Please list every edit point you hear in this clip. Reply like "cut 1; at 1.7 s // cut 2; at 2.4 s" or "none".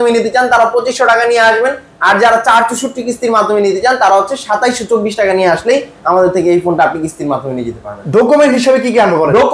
none